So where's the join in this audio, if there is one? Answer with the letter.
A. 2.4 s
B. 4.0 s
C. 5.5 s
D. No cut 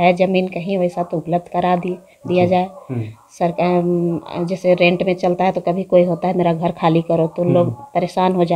D